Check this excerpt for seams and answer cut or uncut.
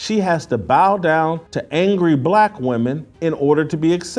uncut